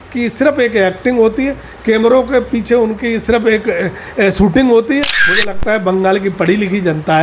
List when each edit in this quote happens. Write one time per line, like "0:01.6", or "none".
0:05.2

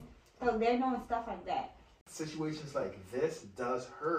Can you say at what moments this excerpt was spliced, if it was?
0:01.9

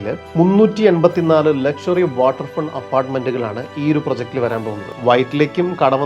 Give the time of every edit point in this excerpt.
0:04.8

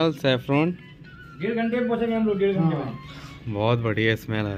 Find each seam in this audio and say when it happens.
none

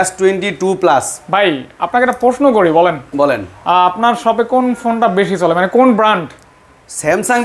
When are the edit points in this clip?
none

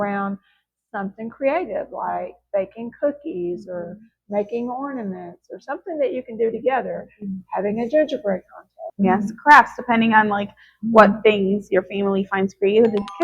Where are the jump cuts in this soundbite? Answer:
0:08.8

